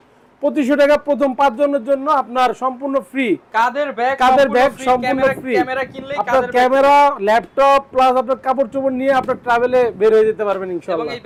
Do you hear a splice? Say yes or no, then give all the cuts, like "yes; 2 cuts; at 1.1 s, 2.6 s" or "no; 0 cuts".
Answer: no; 0 cuts